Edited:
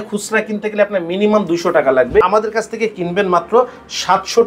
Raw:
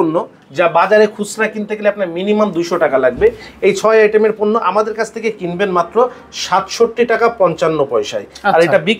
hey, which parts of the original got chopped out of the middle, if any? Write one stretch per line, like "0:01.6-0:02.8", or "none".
0:03.3-0:04.7